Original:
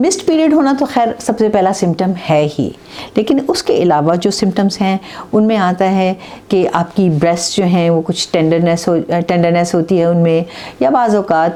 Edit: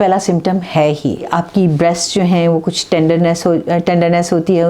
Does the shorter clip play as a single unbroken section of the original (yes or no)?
no